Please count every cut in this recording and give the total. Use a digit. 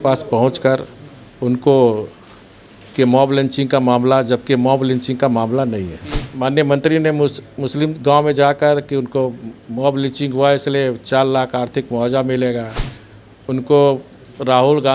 1